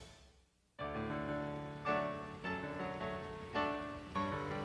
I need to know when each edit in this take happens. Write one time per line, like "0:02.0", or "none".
0:03.8